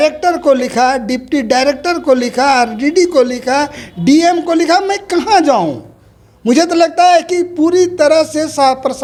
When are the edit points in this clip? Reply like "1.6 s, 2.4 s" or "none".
none